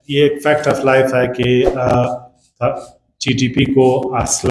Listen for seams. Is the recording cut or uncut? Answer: uncut